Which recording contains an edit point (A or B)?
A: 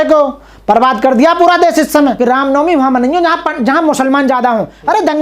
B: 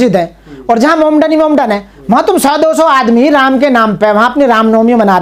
A